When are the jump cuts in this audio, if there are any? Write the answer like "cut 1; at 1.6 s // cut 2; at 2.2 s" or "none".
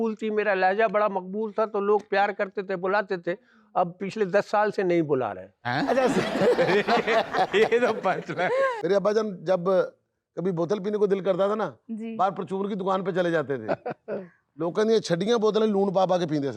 cut 1; at 8.7 s